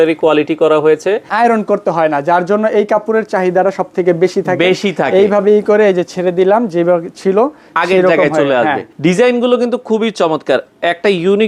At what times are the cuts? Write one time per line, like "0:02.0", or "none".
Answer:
0:01.3
0:08.9